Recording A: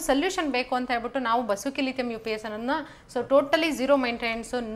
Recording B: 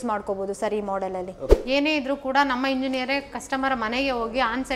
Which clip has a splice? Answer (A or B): B